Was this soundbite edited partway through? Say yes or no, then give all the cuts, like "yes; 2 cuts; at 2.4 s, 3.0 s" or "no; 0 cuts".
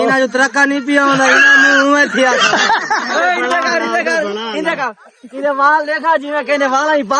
no; 0 cuts